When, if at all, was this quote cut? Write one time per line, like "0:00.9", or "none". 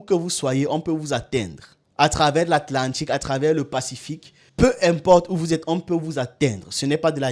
none